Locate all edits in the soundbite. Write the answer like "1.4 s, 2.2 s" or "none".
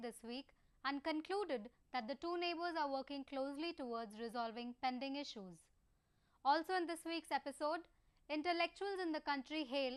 none